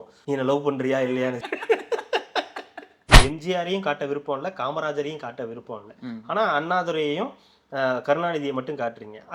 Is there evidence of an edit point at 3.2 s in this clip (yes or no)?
yes